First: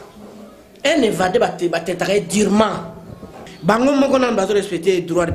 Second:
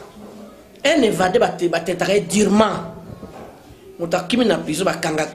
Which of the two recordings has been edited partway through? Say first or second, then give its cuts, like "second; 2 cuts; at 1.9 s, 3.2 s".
first; 1 cut; at 3.5 s